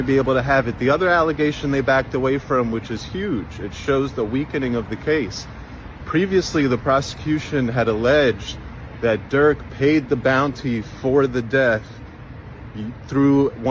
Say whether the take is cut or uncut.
uncut